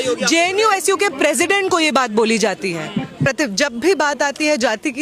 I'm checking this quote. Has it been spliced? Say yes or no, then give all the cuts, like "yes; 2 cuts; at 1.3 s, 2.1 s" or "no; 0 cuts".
yes; 1 cut; at 3.3 s